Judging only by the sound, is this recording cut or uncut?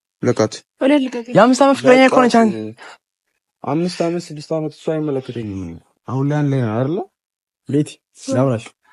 uncut